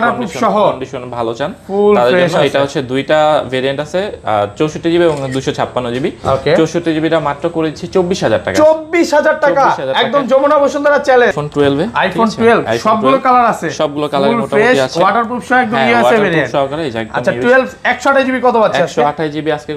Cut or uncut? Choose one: cut